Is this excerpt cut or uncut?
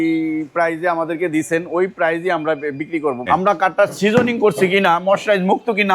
cut